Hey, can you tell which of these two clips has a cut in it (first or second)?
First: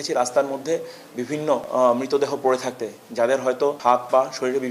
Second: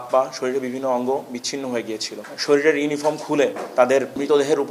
second